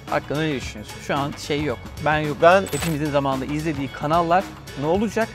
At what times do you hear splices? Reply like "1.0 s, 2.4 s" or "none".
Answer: 2.7 s